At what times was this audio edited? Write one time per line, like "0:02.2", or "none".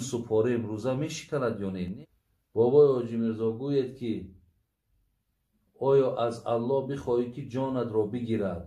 0:01.9

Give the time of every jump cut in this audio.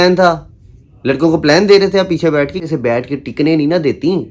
0:02.6

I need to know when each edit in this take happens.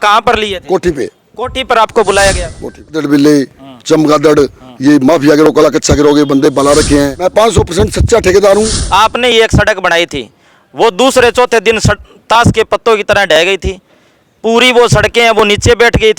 0:03.0
0:07.1
0:08.8

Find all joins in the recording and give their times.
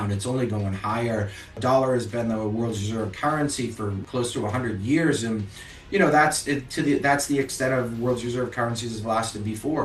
0:01.6
0:04.0

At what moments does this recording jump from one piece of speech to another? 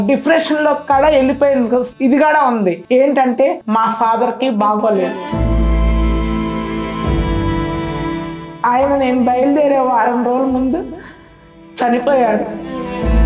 0:01.9
0:02.8
0:03.6

